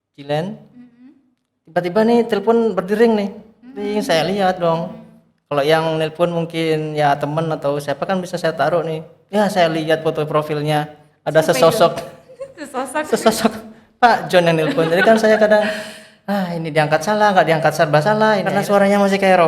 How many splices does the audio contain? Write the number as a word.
one